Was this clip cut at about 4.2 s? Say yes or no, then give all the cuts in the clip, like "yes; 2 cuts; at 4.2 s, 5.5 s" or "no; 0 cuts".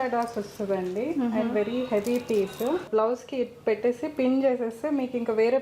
no; 1 cut; at 2.8 s